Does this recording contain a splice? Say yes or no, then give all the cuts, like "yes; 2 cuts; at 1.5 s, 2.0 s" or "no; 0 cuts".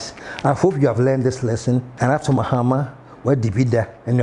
yes; 1 cut; at 1.9 s